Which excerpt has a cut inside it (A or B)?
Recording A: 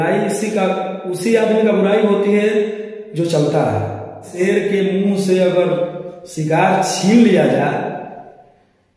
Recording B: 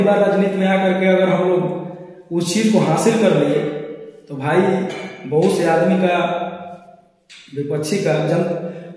A